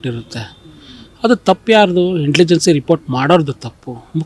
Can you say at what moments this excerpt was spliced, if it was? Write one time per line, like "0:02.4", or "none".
none